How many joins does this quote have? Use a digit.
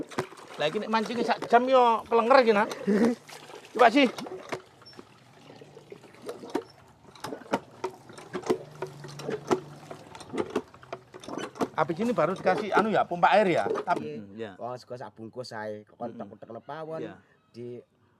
1